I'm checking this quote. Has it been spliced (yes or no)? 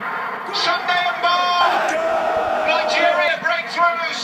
no